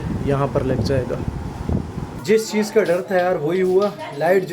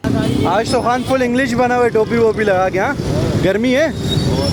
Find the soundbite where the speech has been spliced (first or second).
first